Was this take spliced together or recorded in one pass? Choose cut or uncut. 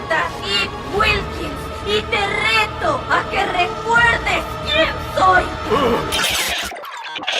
uncut